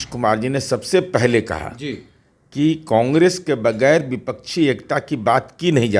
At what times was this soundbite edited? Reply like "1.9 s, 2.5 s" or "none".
none